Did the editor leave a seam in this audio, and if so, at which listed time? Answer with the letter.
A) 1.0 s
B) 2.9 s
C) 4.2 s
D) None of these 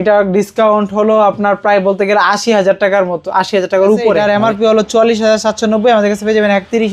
C